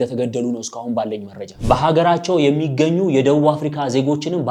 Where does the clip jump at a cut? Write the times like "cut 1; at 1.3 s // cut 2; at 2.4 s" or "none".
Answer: cut 1; at 1.5 s

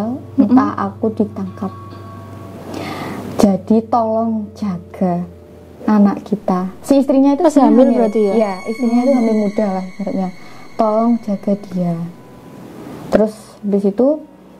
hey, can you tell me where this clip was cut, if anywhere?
none

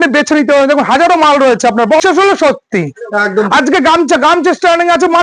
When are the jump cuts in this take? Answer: cut 1; at 2.0 s

